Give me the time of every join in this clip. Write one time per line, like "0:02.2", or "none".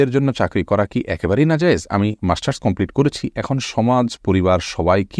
none